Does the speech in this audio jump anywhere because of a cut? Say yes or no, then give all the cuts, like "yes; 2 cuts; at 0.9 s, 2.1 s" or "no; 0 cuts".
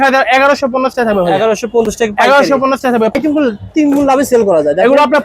yes; 1 cut; at 3.2 s